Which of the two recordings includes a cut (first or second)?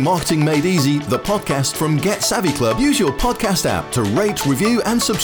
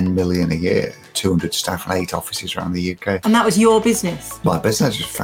second